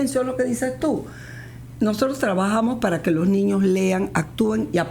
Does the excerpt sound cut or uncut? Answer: uncut